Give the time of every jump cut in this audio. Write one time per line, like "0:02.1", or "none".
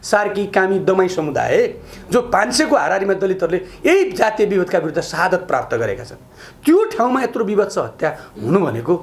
none